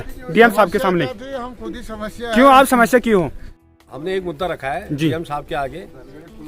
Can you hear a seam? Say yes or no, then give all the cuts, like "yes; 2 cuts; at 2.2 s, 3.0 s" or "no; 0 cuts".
yes; 1 cut; at 3.6 s